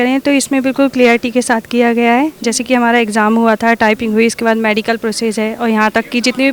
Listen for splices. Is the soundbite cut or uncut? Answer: uncut